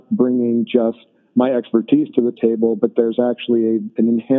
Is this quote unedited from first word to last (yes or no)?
yes